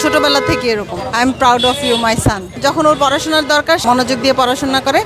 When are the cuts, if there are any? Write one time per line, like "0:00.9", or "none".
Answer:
0:00.9
0:02.5
0:03.8